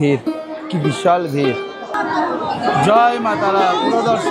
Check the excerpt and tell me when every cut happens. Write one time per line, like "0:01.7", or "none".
0:01.9